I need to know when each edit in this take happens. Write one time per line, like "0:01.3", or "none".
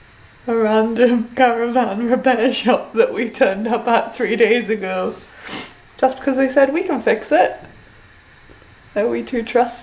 none